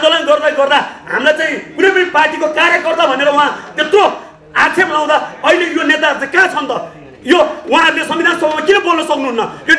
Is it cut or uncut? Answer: uncut